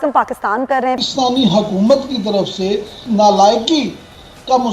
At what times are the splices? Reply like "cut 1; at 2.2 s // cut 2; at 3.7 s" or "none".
cut 1; at 1.0 s // cut 2; at 3.0 s